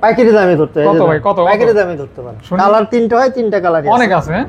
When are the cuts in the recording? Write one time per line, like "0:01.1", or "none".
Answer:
none